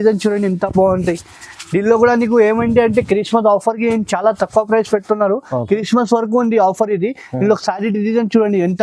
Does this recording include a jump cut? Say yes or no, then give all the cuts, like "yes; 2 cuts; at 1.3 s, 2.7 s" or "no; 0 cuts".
no; 0 cuts